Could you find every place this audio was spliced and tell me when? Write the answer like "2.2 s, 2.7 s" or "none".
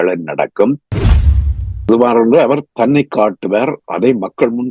1.2 s